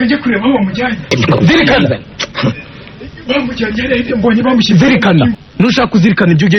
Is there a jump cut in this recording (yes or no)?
yes